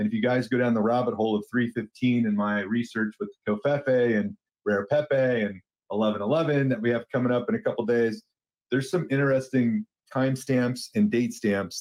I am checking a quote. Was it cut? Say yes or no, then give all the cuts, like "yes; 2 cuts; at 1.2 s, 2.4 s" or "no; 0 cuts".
yes; 1 cut; at 8.5 s